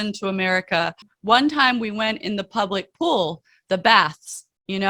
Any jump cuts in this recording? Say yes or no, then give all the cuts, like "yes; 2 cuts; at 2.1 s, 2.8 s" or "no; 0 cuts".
yes; 1 cut; at 1.1 s